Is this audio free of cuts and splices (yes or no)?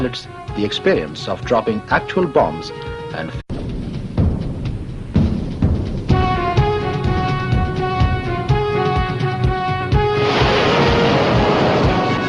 yes